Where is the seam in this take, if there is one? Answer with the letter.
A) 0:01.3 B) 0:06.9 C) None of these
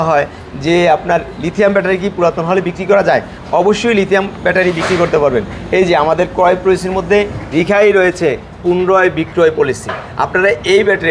C